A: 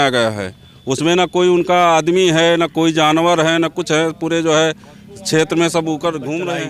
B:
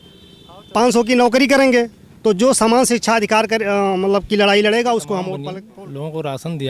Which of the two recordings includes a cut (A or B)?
B